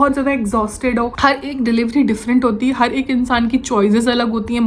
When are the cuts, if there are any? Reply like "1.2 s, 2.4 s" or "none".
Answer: 1.1 s